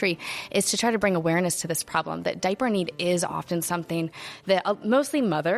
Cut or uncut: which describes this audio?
uncut